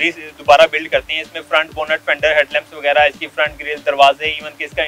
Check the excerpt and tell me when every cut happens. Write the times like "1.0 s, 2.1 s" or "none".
none